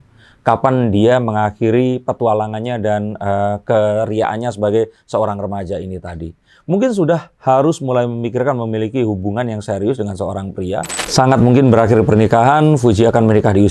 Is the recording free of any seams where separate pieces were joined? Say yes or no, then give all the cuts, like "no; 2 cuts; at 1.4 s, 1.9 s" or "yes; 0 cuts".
no; 1 cut; at 11.0 s